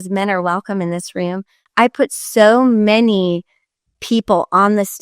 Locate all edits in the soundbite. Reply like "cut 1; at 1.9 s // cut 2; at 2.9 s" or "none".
cut 1; at 1.5 s